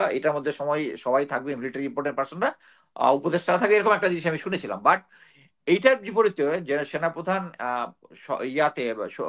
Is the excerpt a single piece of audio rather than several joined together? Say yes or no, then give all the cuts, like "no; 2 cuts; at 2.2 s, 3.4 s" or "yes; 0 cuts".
yes; 0 cuts